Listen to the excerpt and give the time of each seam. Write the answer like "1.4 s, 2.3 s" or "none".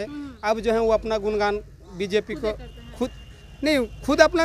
none